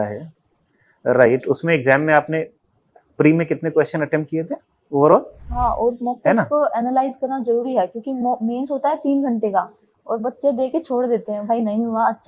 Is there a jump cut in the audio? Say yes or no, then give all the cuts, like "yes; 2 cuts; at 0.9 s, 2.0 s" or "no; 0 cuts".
yes; 1 cut; at 5.5 s